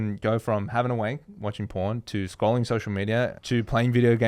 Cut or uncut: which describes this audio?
cut